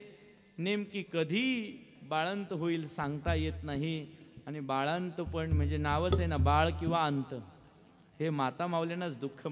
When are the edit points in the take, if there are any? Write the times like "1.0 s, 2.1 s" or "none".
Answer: none